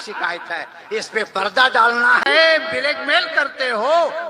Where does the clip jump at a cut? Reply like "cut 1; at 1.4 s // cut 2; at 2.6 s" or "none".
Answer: cut 1; at 2.2 s